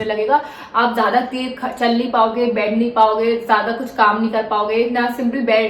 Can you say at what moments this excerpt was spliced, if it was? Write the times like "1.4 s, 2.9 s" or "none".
none